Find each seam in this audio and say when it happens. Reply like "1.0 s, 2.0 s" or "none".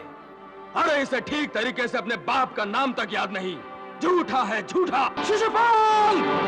5.2 s